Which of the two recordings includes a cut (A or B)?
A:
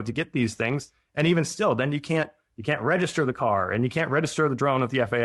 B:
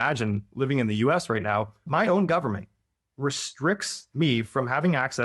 B